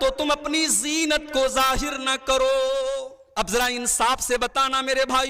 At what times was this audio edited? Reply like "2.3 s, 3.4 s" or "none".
3.2 s